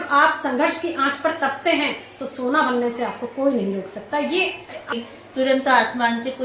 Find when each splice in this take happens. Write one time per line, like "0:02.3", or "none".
0:04.9